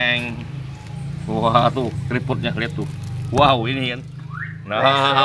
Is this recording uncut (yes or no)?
yes